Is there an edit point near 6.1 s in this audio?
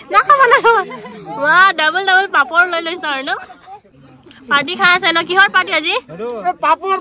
no; 1 cut; at 3.9 s

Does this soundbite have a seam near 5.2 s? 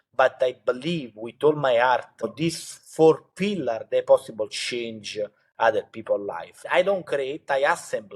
no; 2 cuts; at 2.3 s, 6.5 s

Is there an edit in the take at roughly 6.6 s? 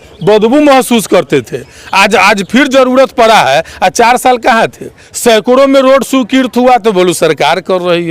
no; 1 cut; at 5.1 s

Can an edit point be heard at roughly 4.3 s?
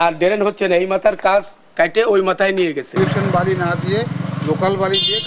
no; 1 cut; at 2.9 s

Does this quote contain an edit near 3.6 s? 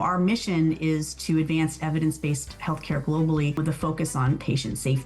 yes; 1 cut; at 3.6 s

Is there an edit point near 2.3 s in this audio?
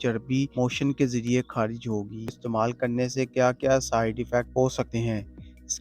yes; 1 cut; at 2.3 s

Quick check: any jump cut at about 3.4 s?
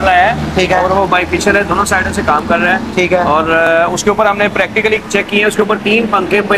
no; 0 cuts

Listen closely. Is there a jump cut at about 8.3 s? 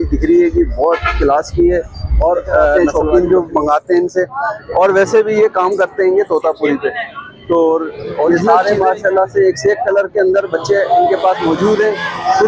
yes; 2 cuts; at 2.8 s, 8.3 s

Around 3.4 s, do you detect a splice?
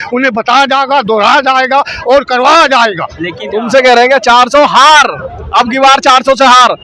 yes; 1 cut; at 3.4 s

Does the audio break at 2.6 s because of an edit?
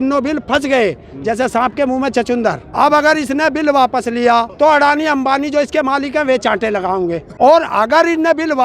yes; 3 cuts; at 2.6 s, 4.5 s, 7.3 s

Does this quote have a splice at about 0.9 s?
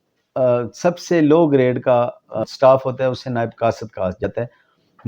no; 2 cuts; at 2.4 s, 4.2 s

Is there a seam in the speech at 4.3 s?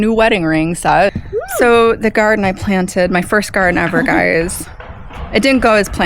no; 1 cut; at 1.2 s

